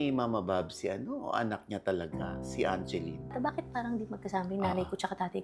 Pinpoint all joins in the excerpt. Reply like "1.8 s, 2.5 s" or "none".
3.3 s